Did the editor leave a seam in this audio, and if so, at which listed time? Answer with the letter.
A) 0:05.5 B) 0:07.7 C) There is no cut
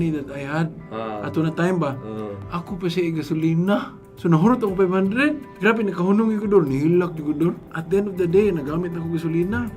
A